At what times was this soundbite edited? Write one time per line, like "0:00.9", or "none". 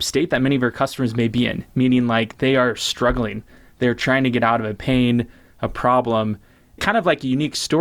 0:06.8